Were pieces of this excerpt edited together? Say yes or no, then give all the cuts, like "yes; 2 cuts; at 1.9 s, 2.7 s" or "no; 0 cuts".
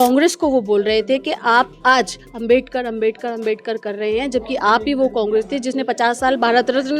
no; 0 cuts